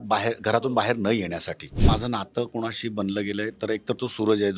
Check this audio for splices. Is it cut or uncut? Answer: cut